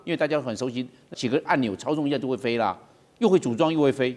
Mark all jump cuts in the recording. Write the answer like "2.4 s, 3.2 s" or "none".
1.1 s